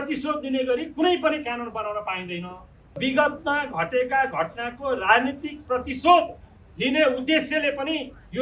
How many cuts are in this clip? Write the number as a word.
one